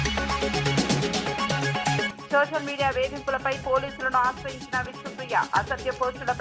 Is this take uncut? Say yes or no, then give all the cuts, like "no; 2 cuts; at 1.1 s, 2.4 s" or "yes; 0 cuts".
no; 1 cut; at 2.1 s